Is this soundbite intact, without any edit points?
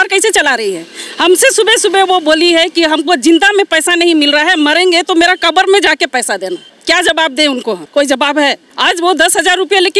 no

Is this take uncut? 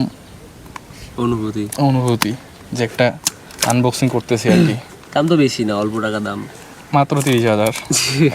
yes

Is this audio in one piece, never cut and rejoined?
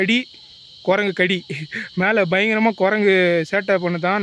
yes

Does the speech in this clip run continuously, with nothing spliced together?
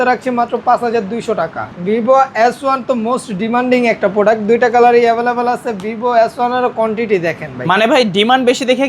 no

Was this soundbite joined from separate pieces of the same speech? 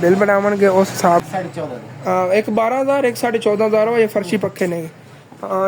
yes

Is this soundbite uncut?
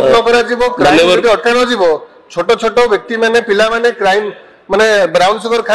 yes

